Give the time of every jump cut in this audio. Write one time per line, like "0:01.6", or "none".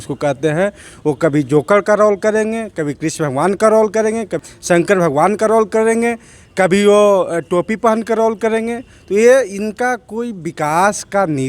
0:04.4